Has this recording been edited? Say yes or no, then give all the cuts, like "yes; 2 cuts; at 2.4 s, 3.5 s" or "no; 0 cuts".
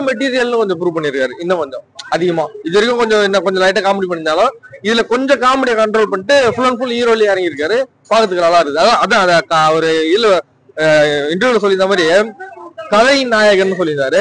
no; 0 cuts